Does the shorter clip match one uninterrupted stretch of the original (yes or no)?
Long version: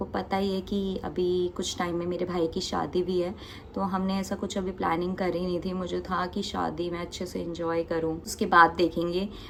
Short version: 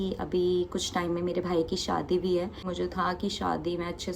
no